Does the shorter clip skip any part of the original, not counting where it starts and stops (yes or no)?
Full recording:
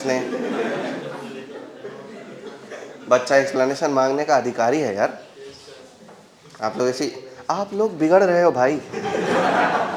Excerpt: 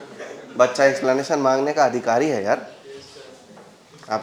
no